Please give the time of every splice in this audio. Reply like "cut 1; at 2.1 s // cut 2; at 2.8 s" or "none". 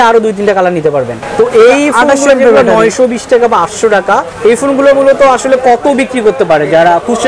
cut 1; at 1.2 s // cut 2; at 4.3 s